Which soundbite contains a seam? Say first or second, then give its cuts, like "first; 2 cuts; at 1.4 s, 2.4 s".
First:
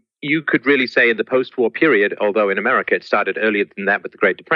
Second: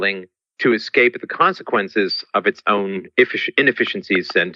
second; 1 cut; at 3.4 s